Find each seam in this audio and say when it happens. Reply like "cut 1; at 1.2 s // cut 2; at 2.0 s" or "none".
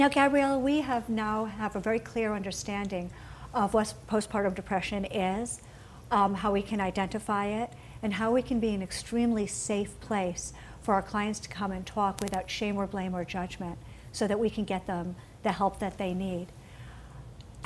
cut 1; at 12.5 s